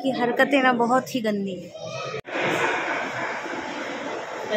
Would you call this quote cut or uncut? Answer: cut